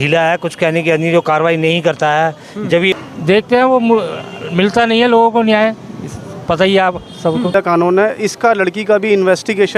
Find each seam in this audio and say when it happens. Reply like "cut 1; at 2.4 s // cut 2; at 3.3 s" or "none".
cut 1; at 2.9 s // cut 2; at 7.5 s